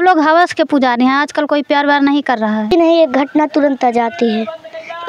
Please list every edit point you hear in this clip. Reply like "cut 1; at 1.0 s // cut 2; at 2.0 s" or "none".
cut 1; at 2.7 s